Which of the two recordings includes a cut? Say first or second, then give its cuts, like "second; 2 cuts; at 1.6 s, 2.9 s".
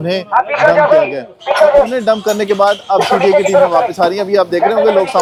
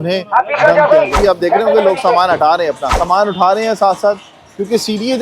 second; 2 cuts; at 1.1 s, 2.9 s